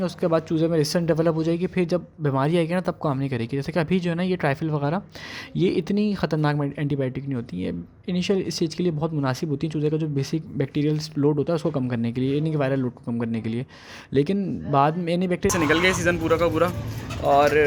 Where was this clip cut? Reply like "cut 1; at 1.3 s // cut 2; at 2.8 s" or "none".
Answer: cut 1; at 15.5 s